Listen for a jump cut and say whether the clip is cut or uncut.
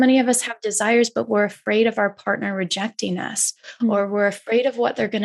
uncut